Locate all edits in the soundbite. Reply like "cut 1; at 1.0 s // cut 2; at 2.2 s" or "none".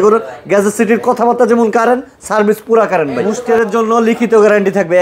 cut 1; at 3.4 s